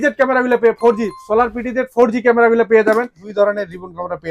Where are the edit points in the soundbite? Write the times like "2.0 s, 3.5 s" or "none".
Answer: 3.2 s